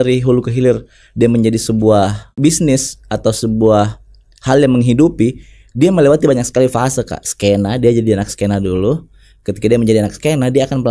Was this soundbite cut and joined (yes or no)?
yes